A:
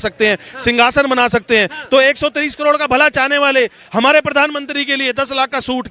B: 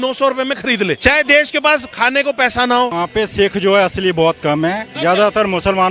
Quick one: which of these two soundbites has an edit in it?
B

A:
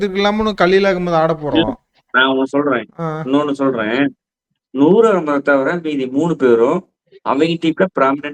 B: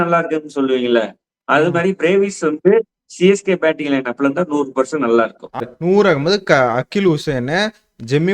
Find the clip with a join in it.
B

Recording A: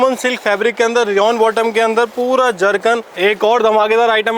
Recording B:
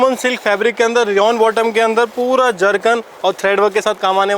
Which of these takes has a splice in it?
A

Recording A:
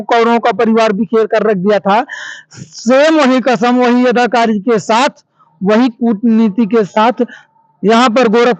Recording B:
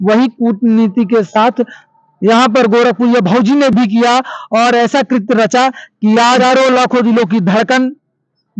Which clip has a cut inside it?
B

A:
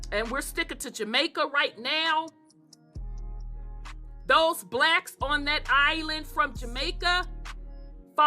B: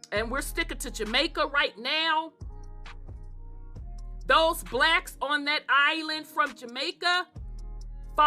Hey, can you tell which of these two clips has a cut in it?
A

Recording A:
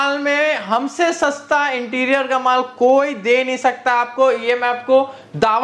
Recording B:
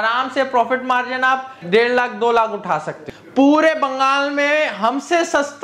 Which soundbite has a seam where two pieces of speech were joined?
B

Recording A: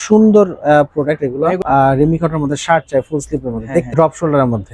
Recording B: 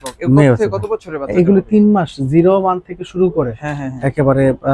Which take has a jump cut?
A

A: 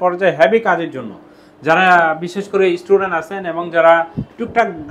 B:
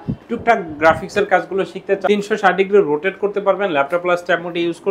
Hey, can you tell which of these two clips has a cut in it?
B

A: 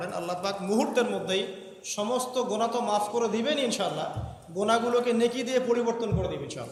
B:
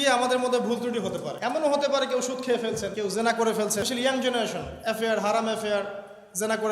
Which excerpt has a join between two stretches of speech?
B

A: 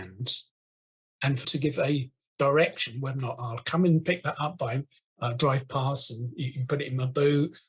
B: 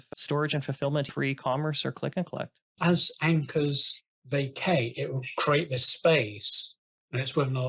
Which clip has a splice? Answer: B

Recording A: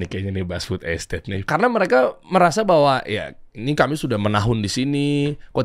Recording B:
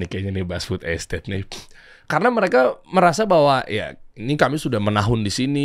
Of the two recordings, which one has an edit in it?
A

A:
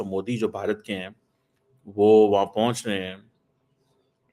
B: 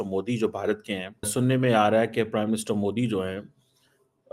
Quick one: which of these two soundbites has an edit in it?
B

